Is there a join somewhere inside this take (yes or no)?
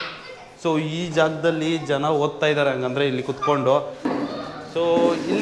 yes